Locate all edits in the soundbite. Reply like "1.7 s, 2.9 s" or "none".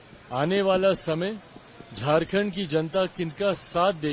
none